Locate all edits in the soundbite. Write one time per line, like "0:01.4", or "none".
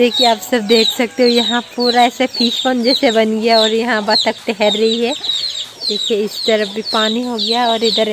none